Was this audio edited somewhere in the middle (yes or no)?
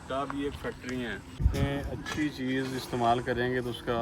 yes